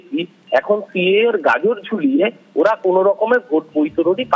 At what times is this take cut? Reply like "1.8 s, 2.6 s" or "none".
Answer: none